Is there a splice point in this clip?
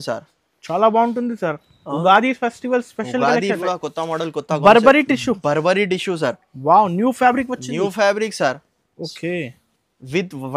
yes; 1 cut; at 3.6 s

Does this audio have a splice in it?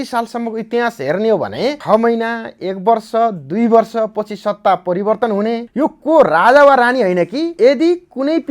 yes; 3 cuts; at 1.8 s, 5.7 s, 7.5 s

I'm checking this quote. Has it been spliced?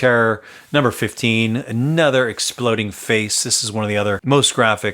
no; 0 cuts

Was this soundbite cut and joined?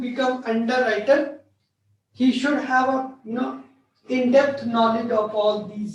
no; 0 cuts

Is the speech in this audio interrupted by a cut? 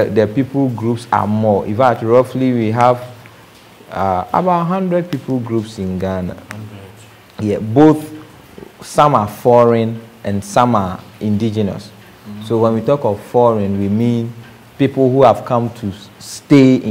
no; 0 cuts

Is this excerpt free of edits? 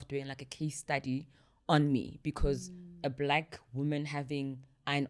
yes; 0 cuts

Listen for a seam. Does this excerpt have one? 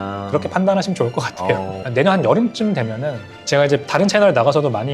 yes; 1 cut; at 1.8 s

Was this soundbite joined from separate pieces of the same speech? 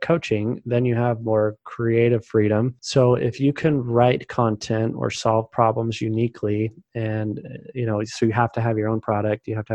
yes; 1 cut; at 2.8 s

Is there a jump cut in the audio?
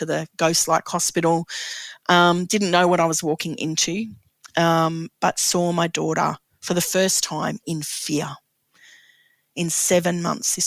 no; 0 cuts

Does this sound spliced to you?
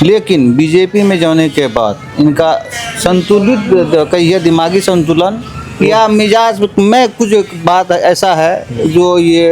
no; 0 cuts

